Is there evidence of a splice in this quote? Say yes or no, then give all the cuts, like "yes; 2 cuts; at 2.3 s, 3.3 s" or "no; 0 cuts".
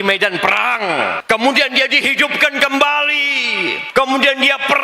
yes; 2 cuts; at 1.2 s, 3.8 s